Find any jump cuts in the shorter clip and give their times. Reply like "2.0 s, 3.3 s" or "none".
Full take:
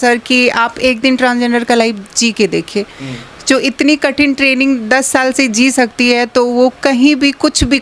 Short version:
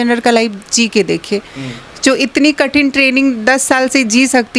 none